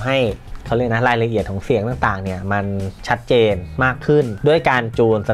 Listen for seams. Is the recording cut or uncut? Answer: cut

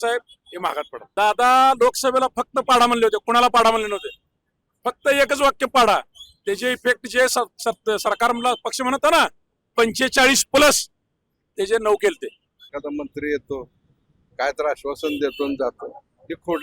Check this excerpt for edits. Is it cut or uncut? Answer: cut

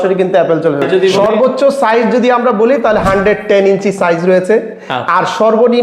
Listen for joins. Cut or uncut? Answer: cut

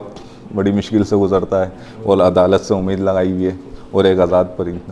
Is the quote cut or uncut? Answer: uncut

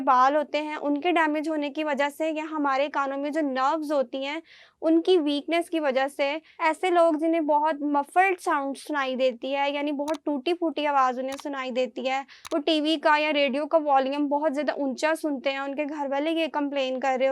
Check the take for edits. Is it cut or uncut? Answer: cut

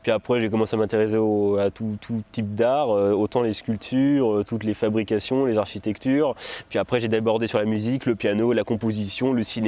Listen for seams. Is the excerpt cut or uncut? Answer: uncut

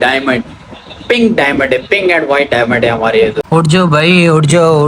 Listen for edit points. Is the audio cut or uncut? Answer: cut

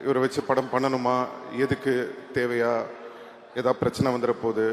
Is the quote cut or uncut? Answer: uncut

